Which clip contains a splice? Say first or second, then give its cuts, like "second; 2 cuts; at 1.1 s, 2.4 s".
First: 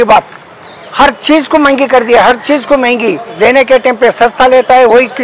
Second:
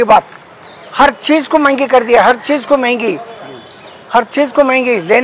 first; 1 cut; at 3.3 s